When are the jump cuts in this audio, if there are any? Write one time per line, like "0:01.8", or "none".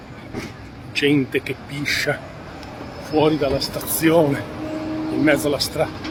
none